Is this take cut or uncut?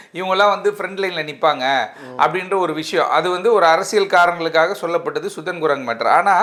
uncut